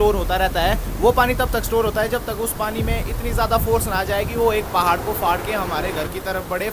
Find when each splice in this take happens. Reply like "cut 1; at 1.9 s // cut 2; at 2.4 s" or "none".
none